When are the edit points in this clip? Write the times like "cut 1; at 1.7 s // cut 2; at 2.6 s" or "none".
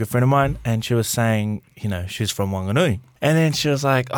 cut 1; at 3.1 s